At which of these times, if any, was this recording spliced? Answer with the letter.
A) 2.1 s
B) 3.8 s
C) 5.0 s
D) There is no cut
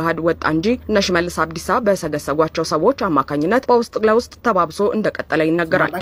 D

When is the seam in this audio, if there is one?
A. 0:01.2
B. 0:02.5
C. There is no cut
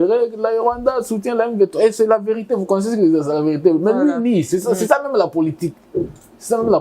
C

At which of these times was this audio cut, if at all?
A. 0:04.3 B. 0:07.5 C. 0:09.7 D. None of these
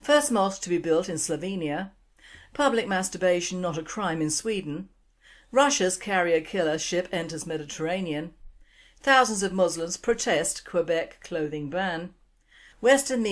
D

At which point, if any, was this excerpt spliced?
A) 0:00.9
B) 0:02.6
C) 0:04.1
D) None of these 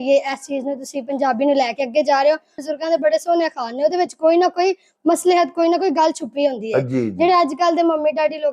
B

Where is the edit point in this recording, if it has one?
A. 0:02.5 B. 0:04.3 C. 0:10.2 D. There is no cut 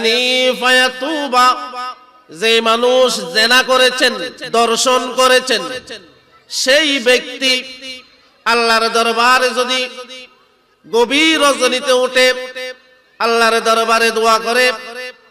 B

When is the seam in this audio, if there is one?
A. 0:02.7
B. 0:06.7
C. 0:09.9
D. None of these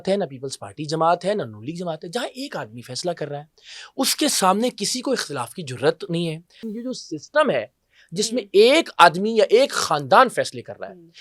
B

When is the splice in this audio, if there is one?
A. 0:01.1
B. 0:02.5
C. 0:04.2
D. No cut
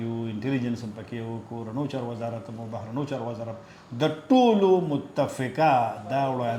D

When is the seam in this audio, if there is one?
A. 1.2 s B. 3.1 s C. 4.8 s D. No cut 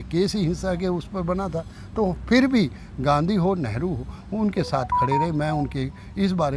D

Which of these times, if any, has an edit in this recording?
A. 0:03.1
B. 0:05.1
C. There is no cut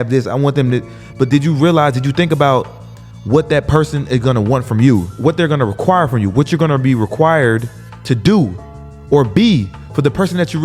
B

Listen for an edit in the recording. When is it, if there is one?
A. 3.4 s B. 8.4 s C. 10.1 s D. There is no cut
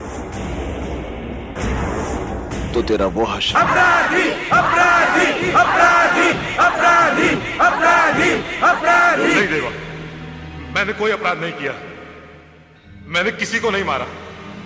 A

